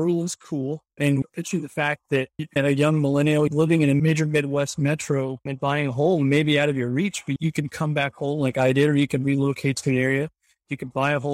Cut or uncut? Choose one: cut